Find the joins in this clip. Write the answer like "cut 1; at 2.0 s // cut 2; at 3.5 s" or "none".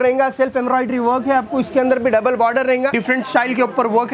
cut 1; at 3.0 s